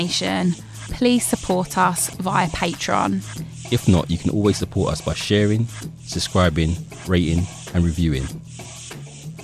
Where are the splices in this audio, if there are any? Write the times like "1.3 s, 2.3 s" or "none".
8.3 s